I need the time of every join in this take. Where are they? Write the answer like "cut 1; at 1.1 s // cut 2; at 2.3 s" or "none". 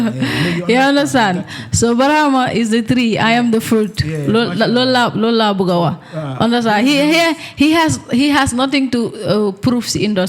none